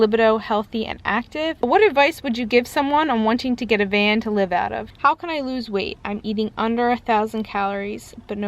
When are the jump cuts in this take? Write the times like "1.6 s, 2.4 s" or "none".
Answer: 1.6 s, 4.9 s